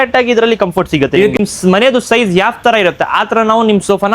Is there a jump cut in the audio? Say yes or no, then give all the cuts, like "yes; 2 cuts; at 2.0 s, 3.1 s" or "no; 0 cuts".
yes; 1 cut; at 1.4 s